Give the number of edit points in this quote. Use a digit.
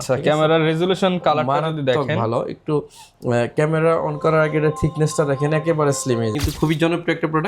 1